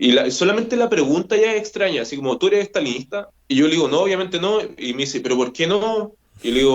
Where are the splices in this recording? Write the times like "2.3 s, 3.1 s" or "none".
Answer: 3.3 s